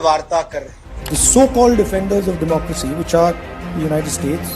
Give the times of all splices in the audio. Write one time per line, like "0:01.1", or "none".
0:01.0

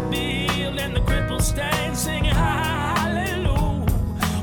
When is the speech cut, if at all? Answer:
none

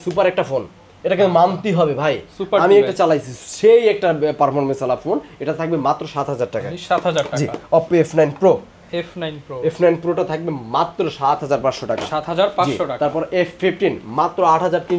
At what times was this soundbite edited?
none

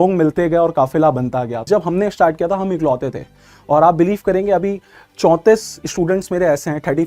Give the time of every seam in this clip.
0:01.6

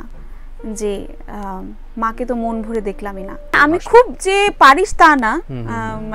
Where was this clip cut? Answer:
0:03.6

